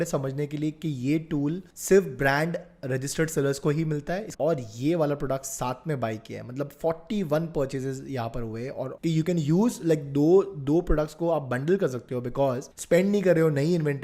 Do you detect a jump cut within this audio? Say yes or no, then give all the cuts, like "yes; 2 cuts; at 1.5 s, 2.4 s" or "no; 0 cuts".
yes; 3 cuts; at 4.3 s, 8.9 s, 12.7 s